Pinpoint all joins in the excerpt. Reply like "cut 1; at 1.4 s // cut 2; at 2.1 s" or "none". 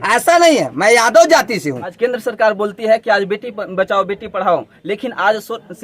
cut 1; at 1.9 s